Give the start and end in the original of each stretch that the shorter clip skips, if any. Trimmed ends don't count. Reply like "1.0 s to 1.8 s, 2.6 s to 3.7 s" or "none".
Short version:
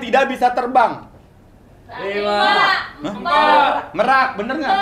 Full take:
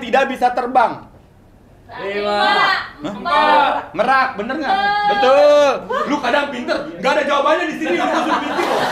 none